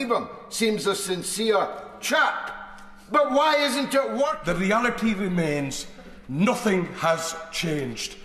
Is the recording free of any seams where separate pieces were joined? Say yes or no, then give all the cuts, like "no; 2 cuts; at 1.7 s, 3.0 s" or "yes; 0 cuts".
no; 1 cut; at 4.4 s